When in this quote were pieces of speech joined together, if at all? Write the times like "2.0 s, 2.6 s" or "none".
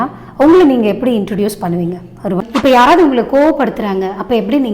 2.5 s